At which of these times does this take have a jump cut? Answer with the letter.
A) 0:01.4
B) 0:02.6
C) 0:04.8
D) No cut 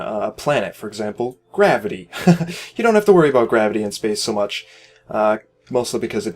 A